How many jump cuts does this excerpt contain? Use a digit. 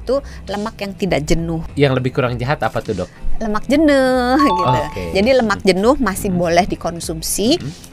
1